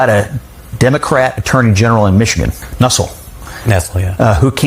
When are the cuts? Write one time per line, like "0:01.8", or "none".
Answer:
none